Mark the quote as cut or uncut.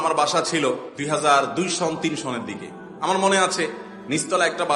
cut